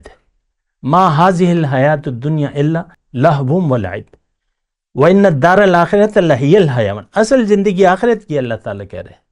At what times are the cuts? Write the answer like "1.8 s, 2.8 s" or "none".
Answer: 3.0 s